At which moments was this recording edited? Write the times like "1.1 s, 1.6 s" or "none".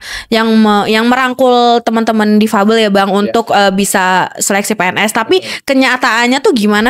none